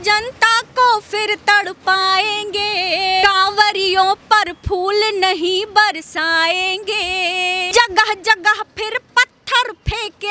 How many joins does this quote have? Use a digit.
2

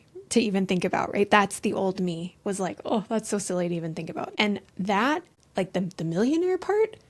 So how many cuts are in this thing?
2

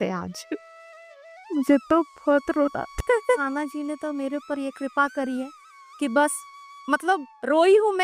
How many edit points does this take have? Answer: 1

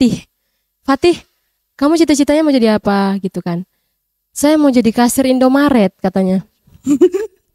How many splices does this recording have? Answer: 0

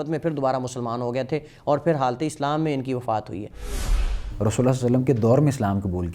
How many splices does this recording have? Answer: 1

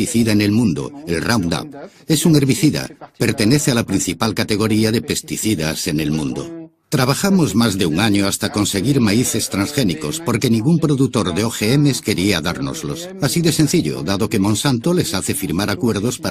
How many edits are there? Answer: 1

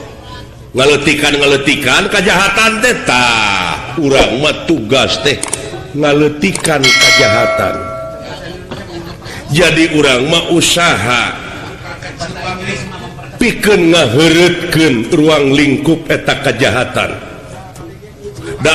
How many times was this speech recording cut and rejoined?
0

